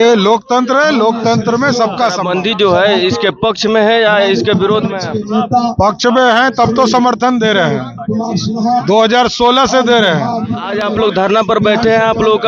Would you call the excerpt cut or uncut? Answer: cut